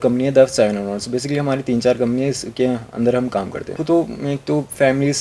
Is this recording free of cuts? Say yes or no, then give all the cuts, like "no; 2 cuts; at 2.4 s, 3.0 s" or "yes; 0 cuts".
no; 1 cut; at 3.8 s